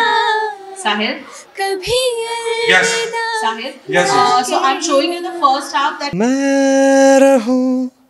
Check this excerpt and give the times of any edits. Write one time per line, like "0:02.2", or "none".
0:06.0